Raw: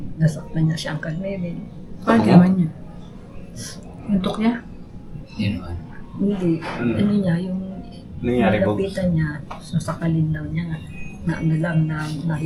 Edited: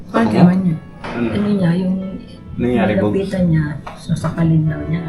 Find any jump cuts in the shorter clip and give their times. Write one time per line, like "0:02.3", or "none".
0:01.0